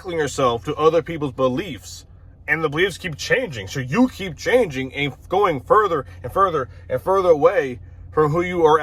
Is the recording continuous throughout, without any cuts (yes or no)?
yes